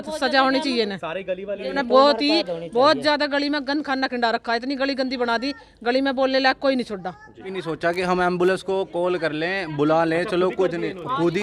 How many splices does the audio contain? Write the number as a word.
two